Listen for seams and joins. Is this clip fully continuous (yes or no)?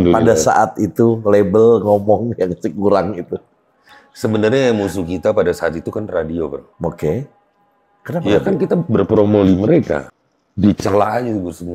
no